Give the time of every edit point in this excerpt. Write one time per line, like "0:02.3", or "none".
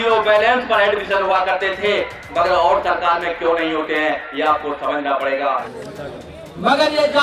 0:05.7